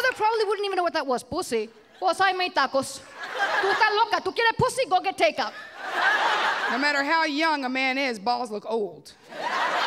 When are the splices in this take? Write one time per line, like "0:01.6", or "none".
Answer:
0:01.8
0:03.6
0:06.7